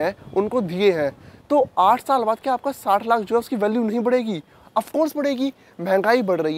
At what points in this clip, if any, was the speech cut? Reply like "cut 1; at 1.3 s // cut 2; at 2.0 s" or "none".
none

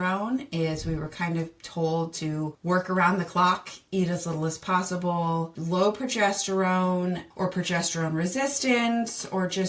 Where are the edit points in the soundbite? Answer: cut 1; at 2.6 s // cut 2; at 5.5 s // cut 3; at 7.3 s

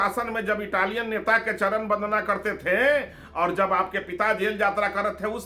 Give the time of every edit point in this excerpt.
none

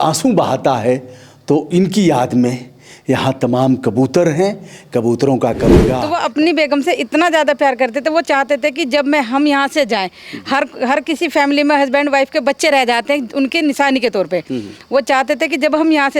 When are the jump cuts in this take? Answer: cut 1; at 6.0 s

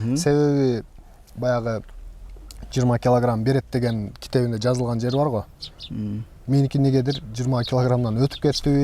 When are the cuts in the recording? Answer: none

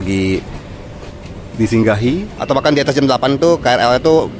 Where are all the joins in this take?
cut 1; at 2.3 s

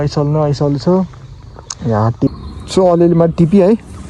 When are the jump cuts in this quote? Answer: cut 1; at 2.3 s

